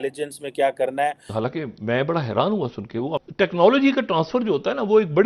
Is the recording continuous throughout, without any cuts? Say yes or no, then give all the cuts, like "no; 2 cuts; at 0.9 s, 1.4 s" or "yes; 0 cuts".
no; 2 cuts; at 1.3 s, 3.1 s